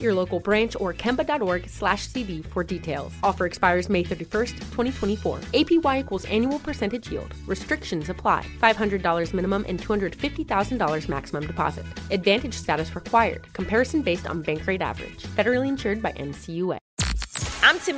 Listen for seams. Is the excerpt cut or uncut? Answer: cut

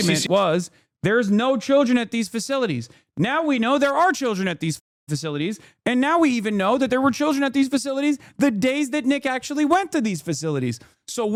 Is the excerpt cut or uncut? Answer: uncut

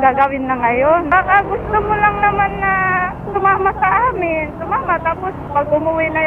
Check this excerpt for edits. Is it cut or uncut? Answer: cut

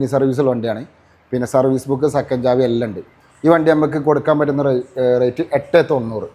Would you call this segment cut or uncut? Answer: uncut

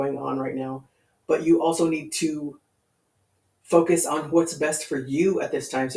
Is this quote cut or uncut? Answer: uncut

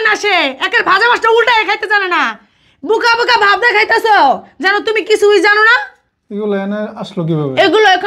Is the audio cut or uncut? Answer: uncut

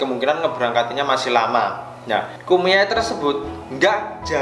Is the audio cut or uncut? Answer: cut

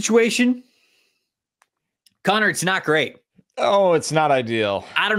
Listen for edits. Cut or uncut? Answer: uncut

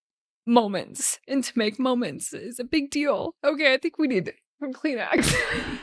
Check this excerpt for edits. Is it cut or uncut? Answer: cut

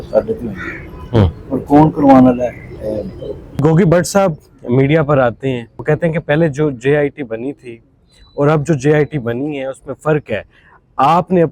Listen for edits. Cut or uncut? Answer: cut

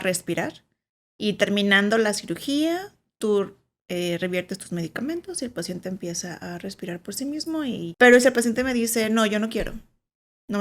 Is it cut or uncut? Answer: cut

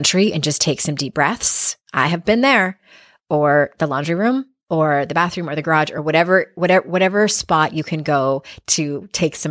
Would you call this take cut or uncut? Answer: uncut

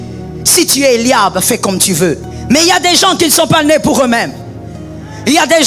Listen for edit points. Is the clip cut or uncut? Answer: cut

